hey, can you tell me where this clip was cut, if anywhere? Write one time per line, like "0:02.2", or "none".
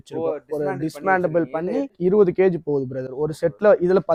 none

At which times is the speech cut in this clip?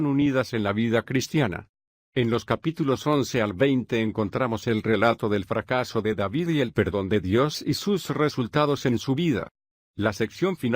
0:08.2

